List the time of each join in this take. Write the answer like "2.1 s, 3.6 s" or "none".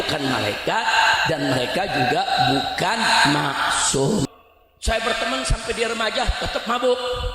4.2 s